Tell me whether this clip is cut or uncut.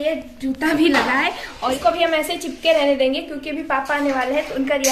cut